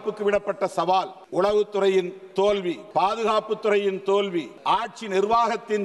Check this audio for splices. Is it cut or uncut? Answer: cut